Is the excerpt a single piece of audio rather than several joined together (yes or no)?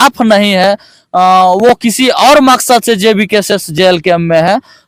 yes